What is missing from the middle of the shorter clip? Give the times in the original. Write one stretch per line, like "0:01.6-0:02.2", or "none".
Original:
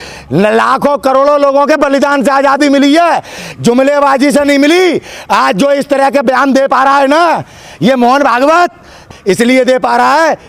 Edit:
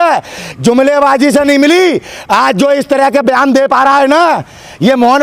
none